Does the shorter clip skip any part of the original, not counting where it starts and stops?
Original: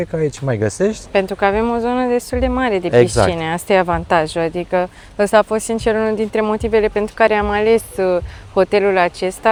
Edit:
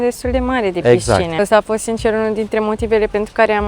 yes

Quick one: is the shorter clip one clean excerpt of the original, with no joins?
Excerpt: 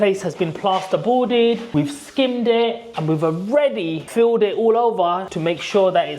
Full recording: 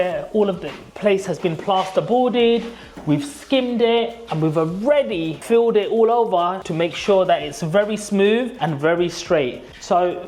no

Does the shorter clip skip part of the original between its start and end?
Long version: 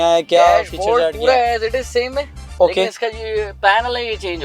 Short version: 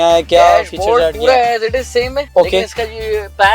yes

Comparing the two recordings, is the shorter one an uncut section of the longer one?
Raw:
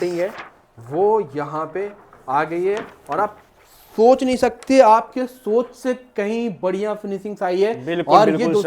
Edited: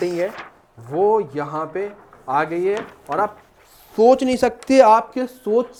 yes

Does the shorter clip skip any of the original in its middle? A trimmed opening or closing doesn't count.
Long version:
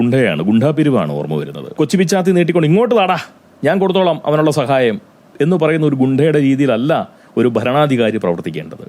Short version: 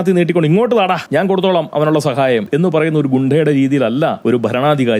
yes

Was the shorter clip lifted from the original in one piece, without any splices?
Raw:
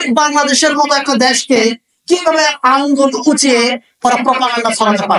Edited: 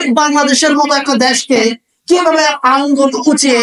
yes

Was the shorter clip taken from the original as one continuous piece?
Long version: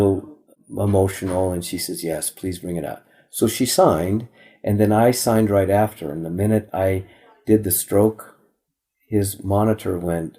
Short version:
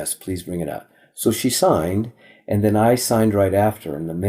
yes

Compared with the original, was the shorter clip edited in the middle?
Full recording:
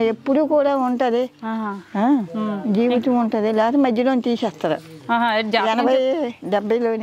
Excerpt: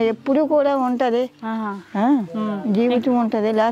no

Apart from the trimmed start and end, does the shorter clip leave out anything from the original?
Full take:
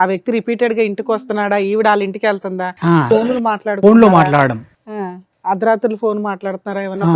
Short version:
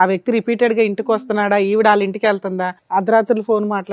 yes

